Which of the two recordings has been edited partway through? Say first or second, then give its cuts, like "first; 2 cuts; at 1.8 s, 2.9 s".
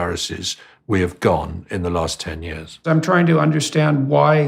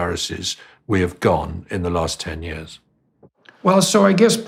first; 1 cut; at 2.9 s